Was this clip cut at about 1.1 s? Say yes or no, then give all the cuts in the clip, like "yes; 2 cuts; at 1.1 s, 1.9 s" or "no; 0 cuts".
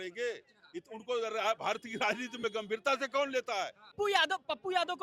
no; 1 cut; at 3.9 s